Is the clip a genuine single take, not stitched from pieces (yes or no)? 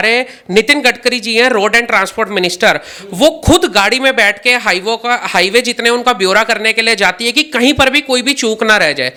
yes